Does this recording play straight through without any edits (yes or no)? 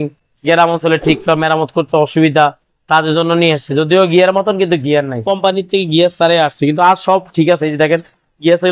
no